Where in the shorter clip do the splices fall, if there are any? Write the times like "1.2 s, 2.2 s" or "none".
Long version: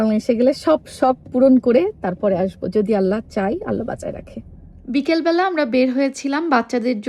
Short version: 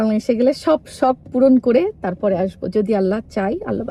none